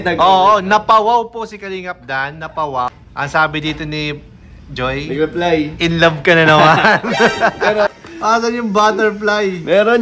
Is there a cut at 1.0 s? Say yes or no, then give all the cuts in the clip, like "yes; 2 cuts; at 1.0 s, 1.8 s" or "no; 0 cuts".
no; 2 cuts; at 2.9 s, 7.9 s